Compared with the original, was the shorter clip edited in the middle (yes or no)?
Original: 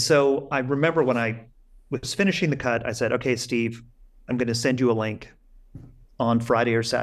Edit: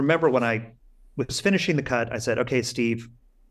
no